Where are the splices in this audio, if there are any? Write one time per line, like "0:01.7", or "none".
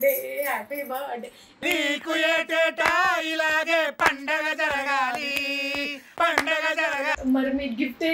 0:07.1